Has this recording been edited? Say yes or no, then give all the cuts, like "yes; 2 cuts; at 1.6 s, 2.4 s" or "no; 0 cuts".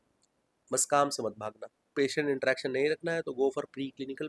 yes; 1 cut; at 1.8 s